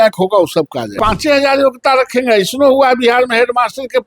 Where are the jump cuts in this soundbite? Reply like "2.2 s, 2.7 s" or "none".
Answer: 0.9 s

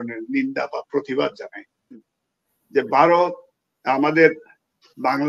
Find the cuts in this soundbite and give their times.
2.1 s

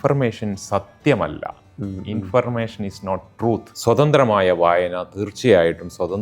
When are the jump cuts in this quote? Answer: 3.7 s

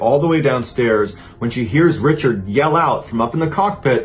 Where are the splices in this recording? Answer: none

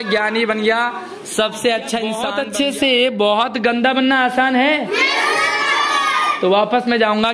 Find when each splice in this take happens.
2.3 s

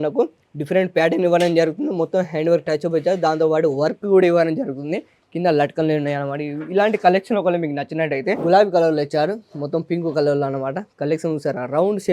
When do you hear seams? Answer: 8.4 s

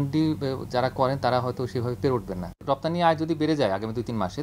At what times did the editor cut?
2.5 s

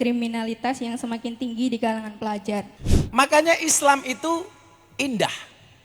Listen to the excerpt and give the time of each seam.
2.7 s

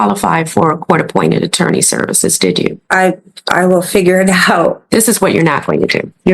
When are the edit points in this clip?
2.8 s, 4.8 s

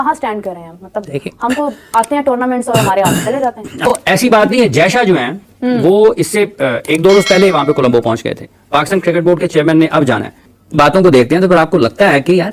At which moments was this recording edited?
none

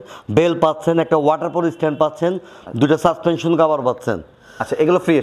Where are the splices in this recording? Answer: none

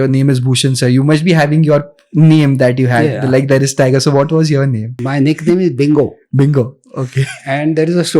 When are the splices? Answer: 5.0 s

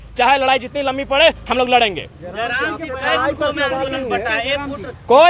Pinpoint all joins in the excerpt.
none

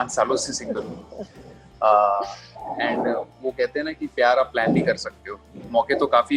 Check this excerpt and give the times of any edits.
none

